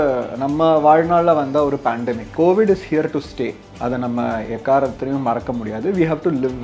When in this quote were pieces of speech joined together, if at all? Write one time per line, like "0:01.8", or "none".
0:02.2
0:03.7

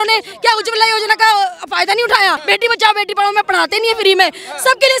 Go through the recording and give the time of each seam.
0:02.4

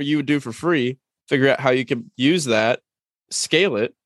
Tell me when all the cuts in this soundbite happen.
none

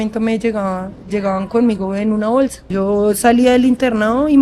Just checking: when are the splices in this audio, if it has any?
0:02.6

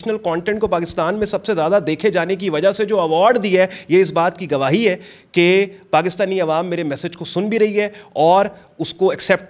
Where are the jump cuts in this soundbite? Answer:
none

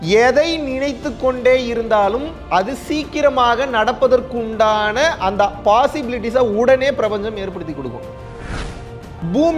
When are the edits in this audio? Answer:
0:08.5

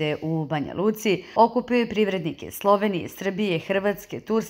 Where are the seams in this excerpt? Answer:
0:01.3

